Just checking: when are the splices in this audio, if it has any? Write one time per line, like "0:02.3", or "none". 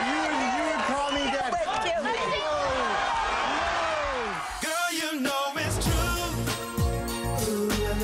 0:04.4